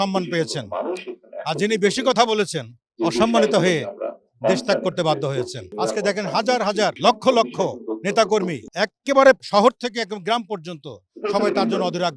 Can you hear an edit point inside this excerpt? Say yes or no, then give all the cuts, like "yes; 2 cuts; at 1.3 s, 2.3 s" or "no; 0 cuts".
yes; 4 cuts; at 5.6 s, 7.0 s, 8.6 s, 9.4 s